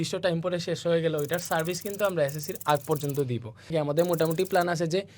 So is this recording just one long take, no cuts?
no; 1 cut; at 3.7 s

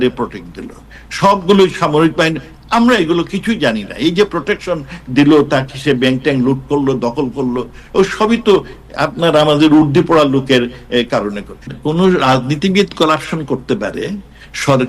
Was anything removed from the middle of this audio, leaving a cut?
yes; 1 cut; at 11.7 s

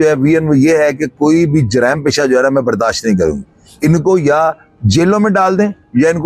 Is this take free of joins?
yes; 0 cuts

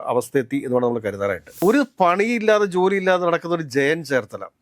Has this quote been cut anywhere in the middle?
yes; 1 cut; at 1.6 s

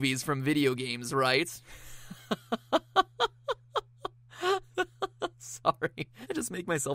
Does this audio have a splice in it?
yes; 1 cut; at 3.4 s

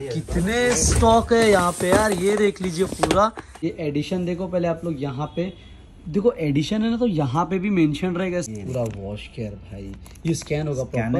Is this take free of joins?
no; 2 cuts; at 3.5 s, 8.5 s

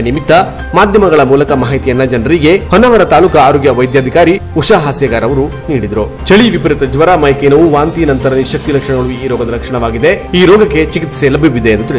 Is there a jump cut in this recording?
no; 0 cuts

